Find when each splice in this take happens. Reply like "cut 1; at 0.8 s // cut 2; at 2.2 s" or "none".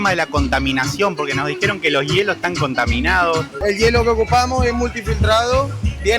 cut 1; at 3.6 s